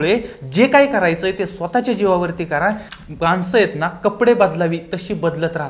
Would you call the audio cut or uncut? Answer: cut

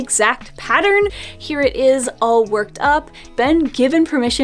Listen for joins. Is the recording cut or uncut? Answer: cut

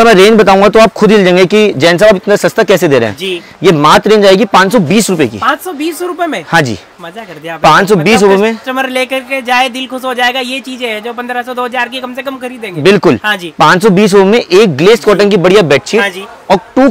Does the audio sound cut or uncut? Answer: uncut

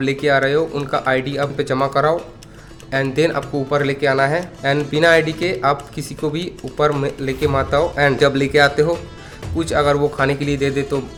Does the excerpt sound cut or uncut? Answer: uncut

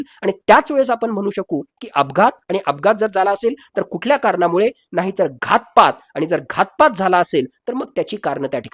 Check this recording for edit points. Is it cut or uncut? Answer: uncut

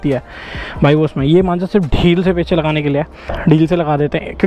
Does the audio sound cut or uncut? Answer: cut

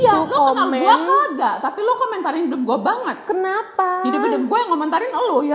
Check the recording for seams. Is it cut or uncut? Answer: uncut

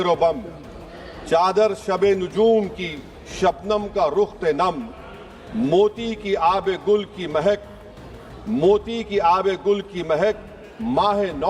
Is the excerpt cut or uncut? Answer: uncut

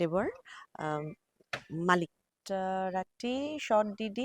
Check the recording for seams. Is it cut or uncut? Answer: cut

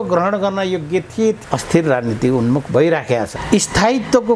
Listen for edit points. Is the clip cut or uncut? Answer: cut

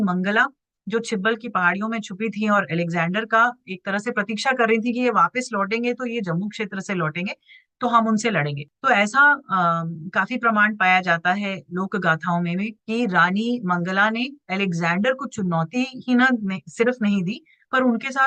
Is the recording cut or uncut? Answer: uncut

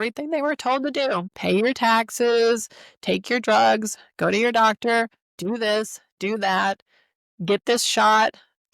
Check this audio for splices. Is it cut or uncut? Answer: cut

